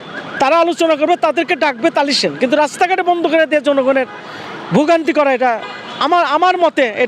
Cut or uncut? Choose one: uncut